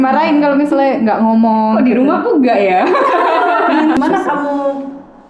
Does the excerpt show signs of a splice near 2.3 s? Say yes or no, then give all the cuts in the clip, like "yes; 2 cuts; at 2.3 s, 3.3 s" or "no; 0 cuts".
no; 1 cut; at 4.0 s